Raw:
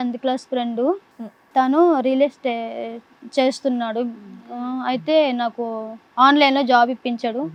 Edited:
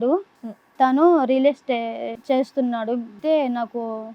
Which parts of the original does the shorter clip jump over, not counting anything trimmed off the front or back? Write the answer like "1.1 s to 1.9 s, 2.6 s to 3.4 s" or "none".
2.9 s to 3.2 s, 4.3 s to 5.0 s